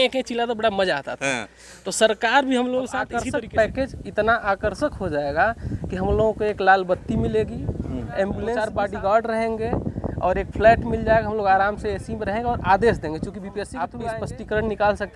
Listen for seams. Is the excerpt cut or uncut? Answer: cut